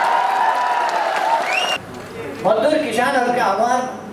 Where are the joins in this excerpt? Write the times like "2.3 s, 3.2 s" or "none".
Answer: 1.8 s